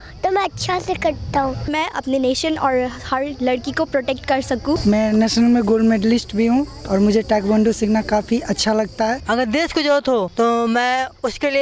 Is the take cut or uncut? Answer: cut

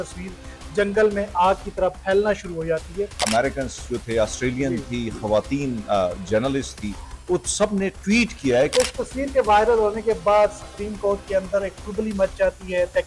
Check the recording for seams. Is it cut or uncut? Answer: cut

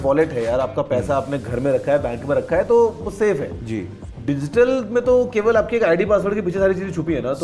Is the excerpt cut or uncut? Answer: uncut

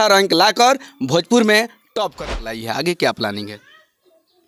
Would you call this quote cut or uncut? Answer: cut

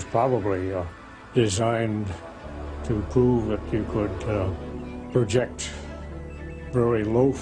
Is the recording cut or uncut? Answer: cut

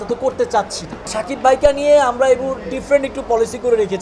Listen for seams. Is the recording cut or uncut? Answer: cut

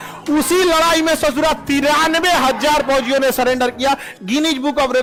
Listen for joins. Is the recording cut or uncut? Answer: uncut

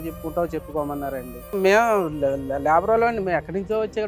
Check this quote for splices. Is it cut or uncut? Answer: cut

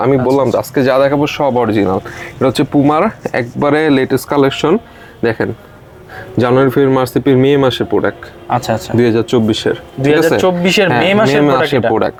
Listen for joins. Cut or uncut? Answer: uncut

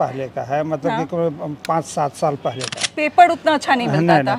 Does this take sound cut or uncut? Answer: cut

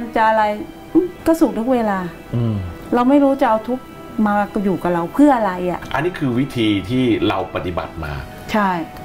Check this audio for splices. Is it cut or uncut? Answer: cut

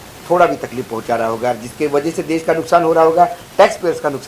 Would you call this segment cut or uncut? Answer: uncut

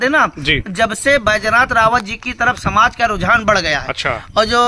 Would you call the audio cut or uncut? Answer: uncut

